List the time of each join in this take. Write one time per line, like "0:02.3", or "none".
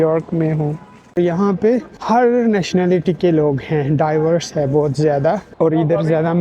0:01.4
0:05.5